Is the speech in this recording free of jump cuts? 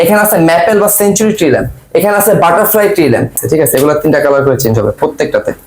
no; 1 cut; at 3.3 s

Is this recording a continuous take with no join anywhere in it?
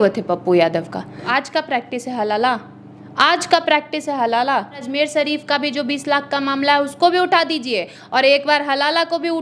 no; 2 cuts; at 1.2 s, 4.8 s

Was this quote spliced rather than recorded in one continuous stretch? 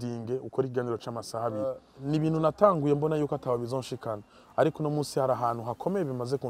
yes; 1 cut; at 1.9 s

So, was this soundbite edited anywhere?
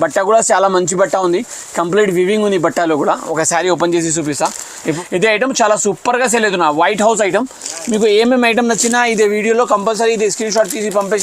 yes; 1 cut; at 5.0 s

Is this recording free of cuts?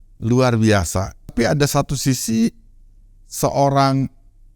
no; 1 cut; at 1.3 s

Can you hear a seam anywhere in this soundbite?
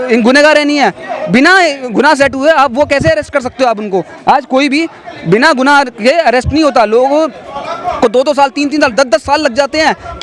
no; 0 cuts

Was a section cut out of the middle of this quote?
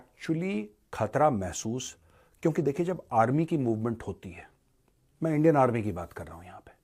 no; 0 cuts

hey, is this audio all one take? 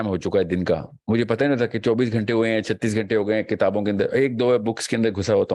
yes; 0 cuts

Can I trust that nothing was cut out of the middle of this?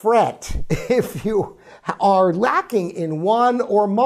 yes; 0 cuts

